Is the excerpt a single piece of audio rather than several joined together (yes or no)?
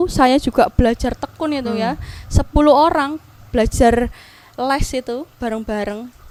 yes